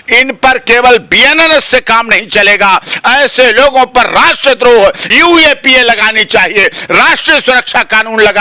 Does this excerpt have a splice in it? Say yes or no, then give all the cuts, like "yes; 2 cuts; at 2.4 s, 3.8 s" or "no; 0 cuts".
yes; 1 cut; at 5.1 s